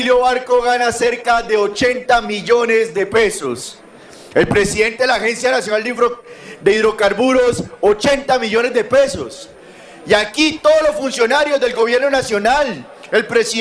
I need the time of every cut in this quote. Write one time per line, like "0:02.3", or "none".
none